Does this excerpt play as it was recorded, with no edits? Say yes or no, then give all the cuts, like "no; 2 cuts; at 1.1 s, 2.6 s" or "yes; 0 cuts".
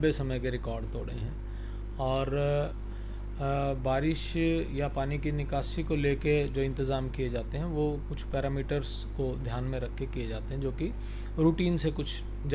yes; 0 cuts